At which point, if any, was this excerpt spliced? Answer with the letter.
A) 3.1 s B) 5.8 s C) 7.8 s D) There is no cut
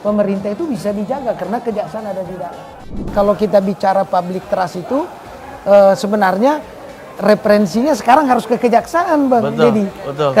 A